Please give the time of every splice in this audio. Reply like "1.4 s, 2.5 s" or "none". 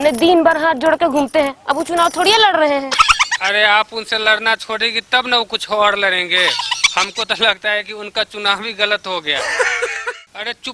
9.8 s